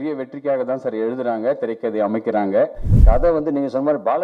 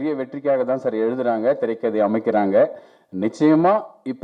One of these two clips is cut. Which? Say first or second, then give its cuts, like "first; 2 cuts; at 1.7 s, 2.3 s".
first; 1 cut; at 2.9 s